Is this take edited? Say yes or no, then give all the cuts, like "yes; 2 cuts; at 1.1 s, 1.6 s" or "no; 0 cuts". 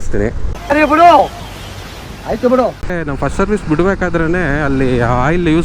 yes; 1 cut; at 3.0 s